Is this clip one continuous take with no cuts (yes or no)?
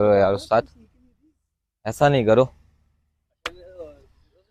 yes